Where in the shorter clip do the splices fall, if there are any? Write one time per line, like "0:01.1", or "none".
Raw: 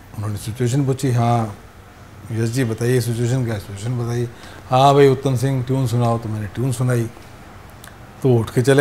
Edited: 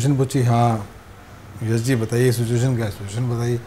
none

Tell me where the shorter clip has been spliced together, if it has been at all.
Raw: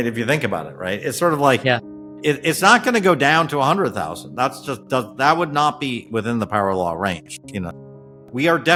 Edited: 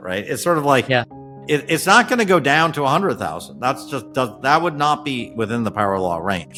none

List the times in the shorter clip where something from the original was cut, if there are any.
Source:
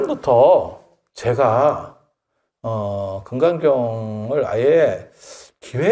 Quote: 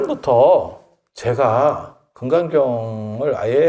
0:02.1

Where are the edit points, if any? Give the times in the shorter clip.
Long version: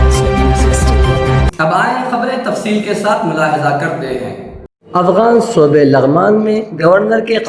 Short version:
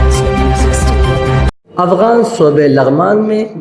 0:01.5

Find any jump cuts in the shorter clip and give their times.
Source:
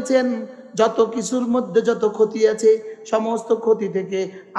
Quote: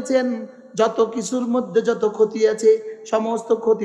none

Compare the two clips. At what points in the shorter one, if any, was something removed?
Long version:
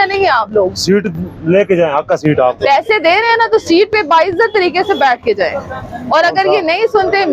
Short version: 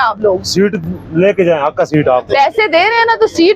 none

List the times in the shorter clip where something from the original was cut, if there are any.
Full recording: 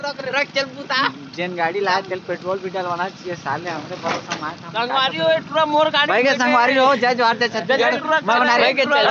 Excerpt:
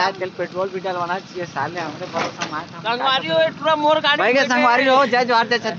none

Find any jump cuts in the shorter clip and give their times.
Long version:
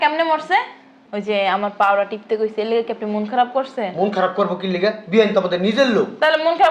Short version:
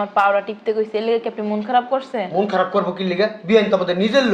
none

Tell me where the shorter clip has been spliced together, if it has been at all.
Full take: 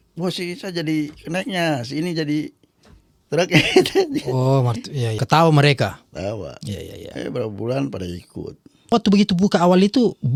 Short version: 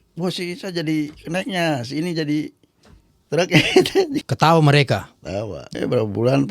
0:04.3
0:05.7

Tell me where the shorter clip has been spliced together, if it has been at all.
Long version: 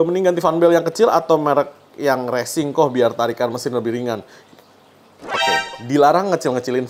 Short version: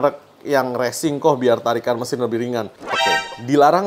0:02.8

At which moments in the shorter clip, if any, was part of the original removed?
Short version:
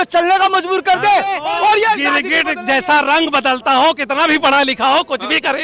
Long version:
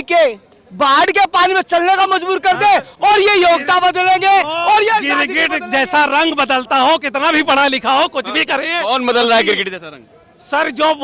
0:01.4

